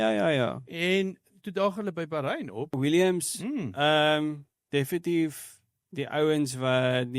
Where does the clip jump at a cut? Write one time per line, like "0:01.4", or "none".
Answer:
0:02.8